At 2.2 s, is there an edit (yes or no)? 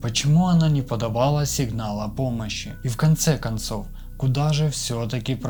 no